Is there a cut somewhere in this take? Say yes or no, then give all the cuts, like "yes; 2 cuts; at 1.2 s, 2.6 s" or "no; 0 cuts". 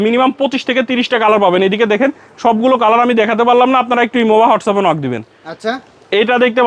no; 0 cuts